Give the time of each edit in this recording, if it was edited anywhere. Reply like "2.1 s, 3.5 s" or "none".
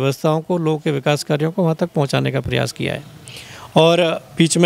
none